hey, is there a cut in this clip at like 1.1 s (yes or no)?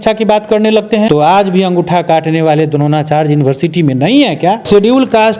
yes